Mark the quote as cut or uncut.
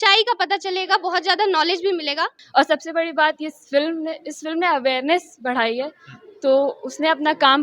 cut